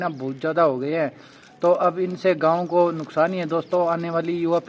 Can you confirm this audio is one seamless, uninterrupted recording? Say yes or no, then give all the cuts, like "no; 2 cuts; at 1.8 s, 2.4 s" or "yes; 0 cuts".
yes; 0 cuts